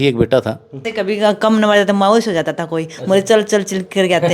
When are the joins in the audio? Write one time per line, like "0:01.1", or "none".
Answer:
0:00.9